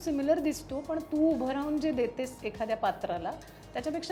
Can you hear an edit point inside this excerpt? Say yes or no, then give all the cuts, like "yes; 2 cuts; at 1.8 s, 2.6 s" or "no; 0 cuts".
no; 0 cuts